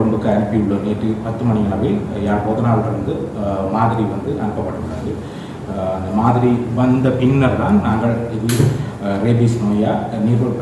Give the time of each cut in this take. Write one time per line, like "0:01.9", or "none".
none